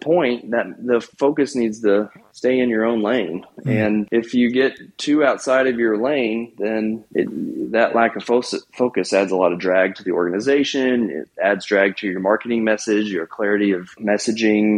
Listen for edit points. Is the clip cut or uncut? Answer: cut